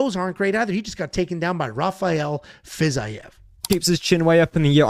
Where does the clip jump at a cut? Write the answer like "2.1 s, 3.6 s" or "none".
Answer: 3.5 s